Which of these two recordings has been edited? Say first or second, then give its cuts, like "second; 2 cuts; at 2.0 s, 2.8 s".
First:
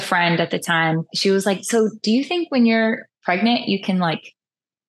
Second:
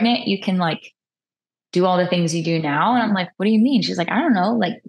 first; 1 cut; at 1.1 s